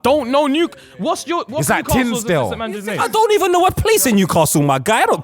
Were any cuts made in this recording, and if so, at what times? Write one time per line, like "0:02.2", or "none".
none

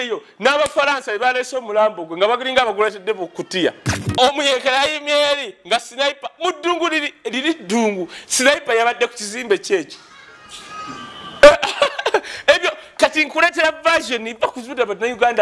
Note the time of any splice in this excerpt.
0:04.0

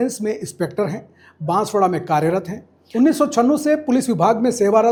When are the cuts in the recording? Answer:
none

